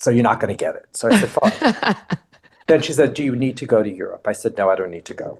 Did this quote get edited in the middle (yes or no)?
no